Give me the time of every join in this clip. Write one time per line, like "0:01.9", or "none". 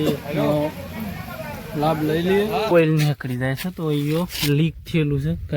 0:02.7